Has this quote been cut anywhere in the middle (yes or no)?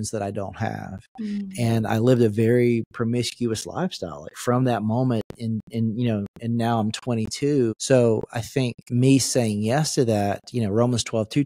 yes